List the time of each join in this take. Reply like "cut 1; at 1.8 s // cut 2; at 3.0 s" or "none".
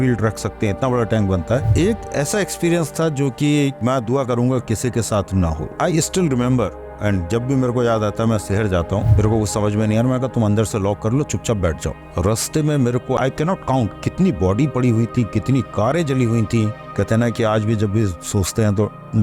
cut 1; at 1.7 s // cut 2; at 5.7 s // cut 3; at 9.1 s // cut 4; at 12.0 s // cut 5; at 16.9 s

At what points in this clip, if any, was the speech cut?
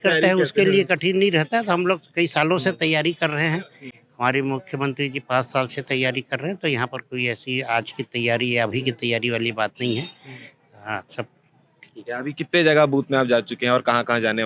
none

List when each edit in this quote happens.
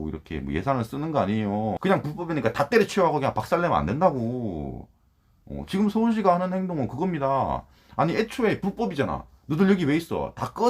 cut 1; at 1.8 s

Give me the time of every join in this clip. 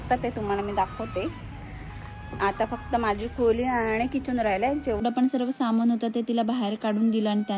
cut 1; at 5.0 s

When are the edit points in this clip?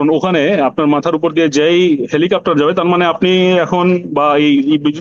none

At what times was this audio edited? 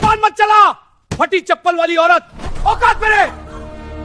none

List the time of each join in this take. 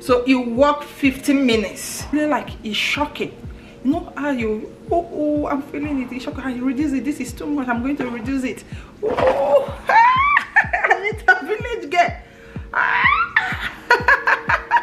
cut 1; at 2.1 s

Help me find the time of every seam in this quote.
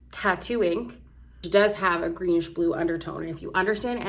cut 1; at 1.4 s

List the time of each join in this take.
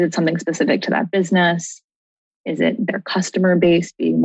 none

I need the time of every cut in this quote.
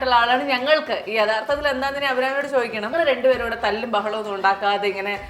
cut 1; at 2.9 s

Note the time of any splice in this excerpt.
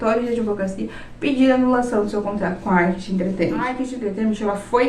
cut 1; at 3.9 s

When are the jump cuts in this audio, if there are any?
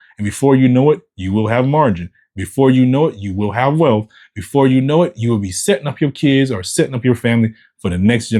none

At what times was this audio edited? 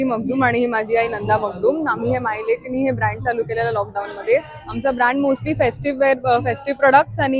none

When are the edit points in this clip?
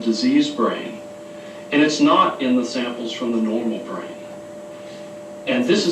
none

